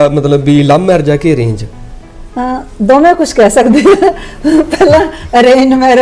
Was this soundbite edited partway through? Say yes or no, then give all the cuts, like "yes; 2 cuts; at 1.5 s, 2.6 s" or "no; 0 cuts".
no; 0 cuts